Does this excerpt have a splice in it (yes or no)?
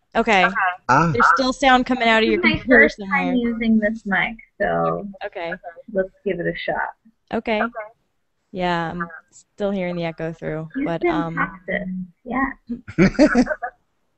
yes